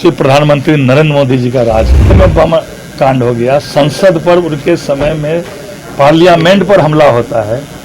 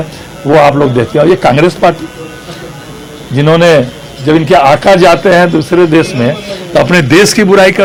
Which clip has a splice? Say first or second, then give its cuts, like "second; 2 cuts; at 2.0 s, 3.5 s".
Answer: first; 1 cut; at 2.1 s